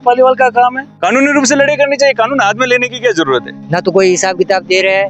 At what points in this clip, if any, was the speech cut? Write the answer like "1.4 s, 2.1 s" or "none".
0.9 s, 3.6 s